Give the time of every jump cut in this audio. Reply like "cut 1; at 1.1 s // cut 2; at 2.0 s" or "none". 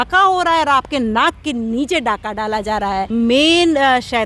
cut 1; at 3.1 s